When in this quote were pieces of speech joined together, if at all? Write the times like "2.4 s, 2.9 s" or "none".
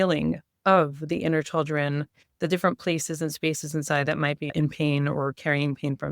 4.5 s

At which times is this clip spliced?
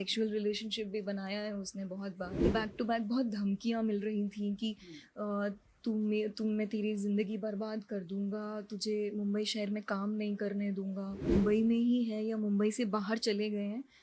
2.5 s, 11.3 s

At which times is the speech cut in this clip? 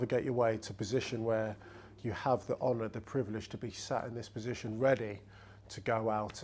none

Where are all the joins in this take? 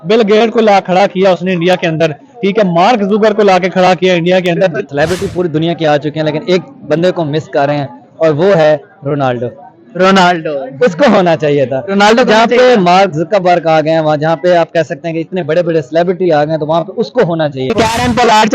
4.8 s, 17.7 s

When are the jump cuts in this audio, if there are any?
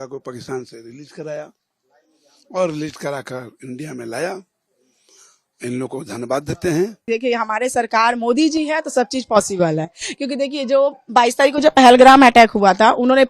7.0 s

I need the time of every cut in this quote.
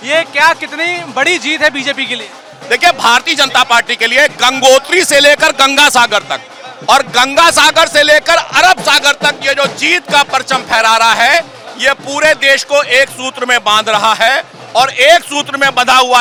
none

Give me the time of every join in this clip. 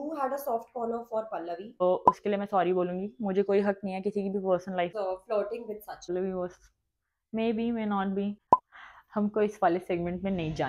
1.8 s, 4.9 s, 6.1 s, 8.4 s

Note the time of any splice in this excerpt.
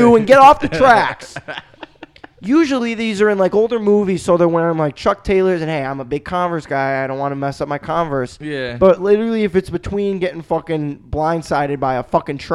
none

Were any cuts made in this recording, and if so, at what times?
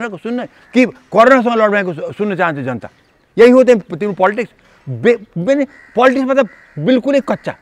none

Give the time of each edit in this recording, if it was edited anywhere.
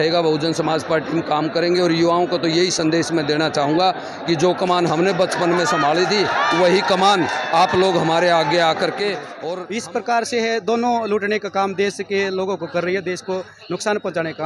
9.4 s

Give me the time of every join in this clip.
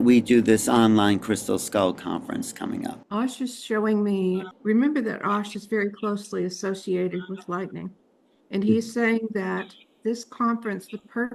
3.0 s, 4.5 s

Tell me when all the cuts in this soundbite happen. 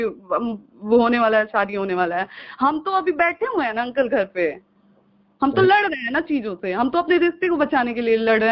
none

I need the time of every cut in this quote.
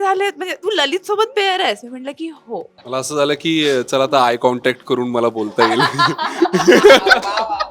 2.8 s

